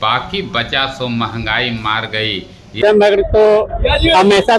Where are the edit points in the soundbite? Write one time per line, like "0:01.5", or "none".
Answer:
0:02.8